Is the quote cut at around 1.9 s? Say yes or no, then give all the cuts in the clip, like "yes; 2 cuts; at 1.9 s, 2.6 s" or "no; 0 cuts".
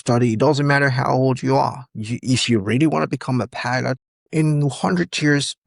no; 1 cut; at 4.1 s